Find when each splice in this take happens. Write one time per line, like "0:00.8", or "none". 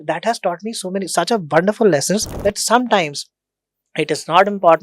0:02.3